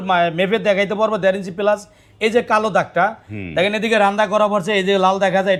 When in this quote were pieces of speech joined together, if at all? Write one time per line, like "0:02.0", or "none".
none